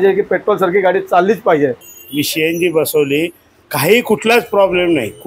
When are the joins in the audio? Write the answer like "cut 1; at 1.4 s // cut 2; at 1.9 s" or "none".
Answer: cut 1; at 1.9 s